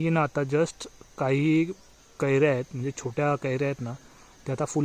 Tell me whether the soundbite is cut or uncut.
uncut